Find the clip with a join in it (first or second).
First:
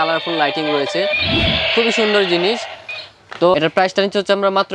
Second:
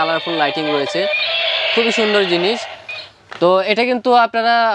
first